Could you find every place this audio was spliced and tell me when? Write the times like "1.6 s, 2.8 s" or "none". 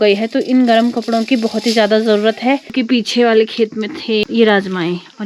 2.7 s, 4.2 s

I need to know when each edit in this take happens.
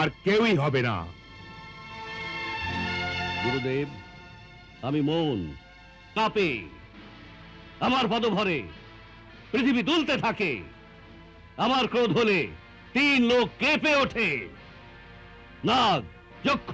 6.1 s

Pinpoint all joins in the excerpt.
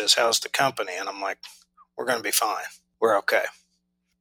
2.8 s

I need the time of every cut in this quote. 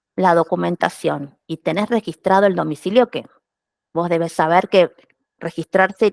none

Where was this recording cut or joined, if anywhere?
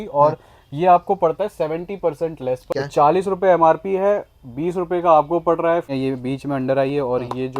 2.7 s, 5.9 s

